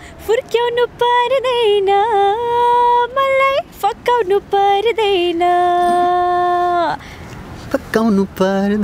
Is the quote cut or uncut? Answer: uncut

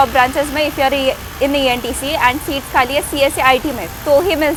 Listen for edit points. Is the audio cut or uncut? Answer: uncut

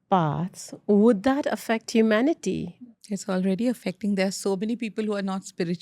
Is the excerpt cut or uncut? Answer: cut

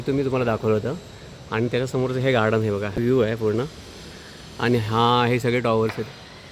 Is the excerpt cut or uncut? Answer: cut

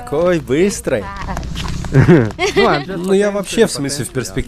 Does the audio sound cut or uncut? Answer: uncut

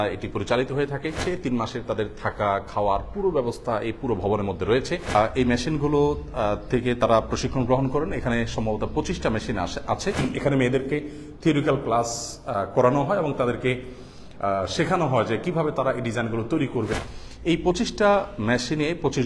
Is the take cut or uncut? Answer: cut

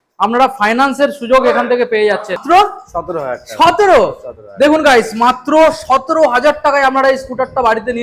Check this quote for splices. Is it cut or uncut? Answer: cut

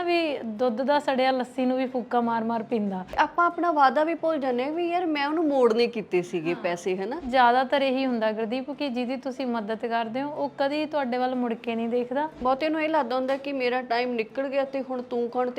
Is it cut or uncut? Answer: cut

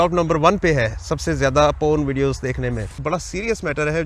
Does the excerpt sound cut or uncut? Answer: cut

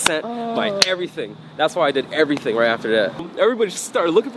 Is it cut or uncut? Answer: cut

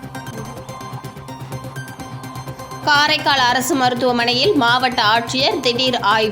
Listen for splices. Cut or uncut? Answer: cut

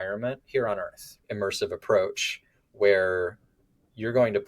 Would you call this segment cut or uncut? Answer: cut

